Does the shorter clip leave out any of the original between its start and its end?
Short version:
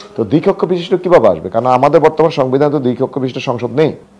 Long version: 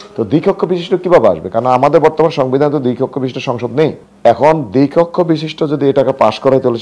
no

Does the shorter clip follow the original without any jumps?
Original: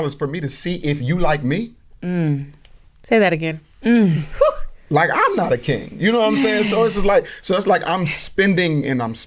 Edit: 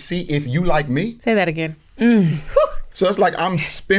no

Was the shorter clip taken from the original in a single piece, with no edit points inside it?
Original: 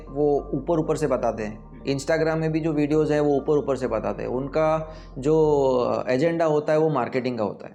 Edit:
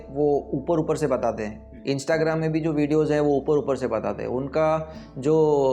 yes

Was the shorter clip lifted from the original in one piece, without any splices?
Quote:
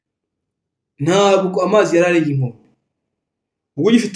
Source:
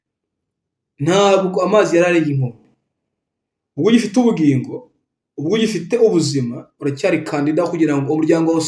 yes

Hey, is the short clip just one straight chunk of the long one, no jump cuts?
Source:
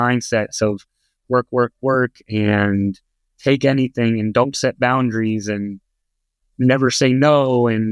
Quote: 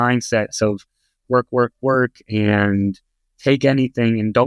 yes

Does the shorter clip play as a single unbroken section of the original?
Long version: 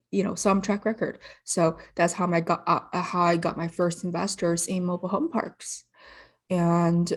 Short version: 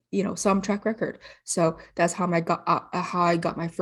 yes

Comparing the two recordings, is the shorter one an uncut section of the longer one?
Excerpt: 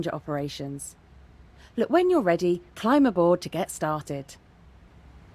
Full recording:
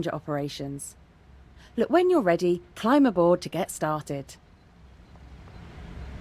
no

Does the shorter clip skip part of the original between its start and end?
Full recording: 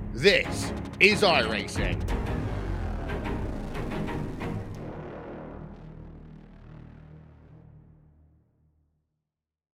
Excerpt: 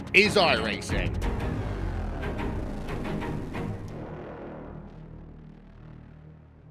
no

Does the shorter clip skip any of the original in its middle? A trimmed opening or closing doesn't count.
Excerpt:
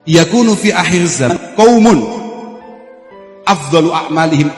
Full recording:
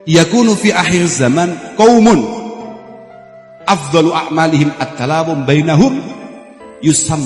yes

